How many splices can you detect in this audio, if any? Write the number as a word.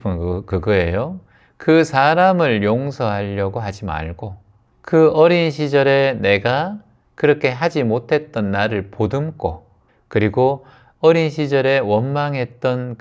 zero